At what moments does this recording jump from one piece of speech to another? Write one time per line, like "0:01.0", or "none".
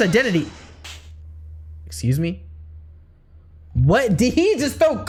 none